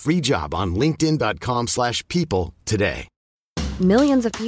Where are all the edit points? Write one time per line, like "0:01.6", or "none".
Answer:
0:03.1